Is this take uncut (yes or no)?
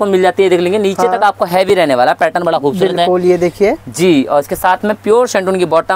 yes